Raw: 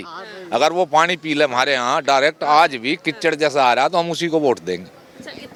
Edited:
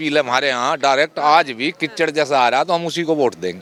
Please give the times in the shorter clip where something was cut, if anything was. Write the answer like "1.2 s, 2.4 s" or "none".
none